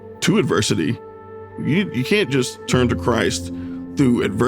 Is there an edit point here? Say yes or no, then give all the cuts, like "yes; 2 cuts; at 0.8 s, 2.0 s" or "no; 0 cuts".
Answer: yes; 1 cut; at 1.5 s